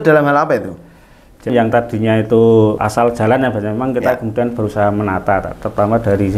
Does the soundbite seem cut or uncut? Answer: cut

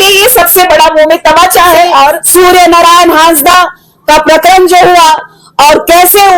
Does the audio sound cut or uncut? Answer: cut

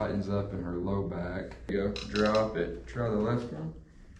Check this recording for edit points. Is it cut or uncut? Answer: cut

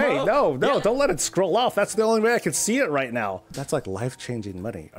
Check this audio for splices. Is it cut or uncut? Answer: cut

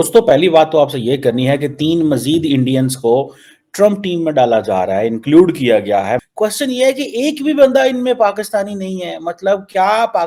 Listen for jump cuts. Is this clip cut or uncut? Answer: uncut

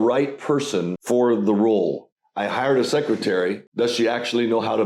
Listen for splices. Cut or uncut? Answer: cut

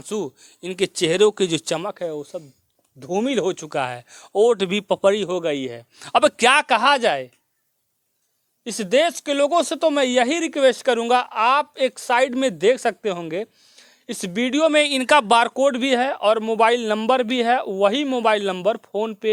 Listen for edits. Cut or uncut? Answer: uncut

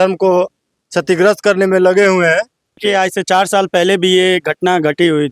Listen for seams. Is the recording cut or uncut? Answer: cut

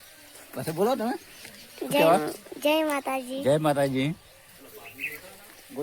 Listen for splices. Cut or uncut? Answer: uncut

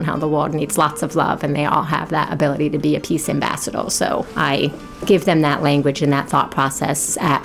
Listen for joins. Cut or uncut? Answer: cut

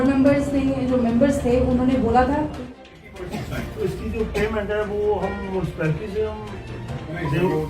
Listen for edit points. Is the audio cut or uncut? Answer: cut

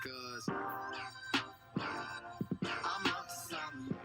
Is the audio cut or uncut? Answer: uncut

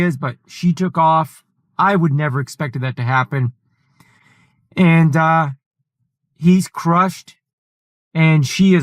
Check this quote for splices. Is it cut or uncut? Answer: cut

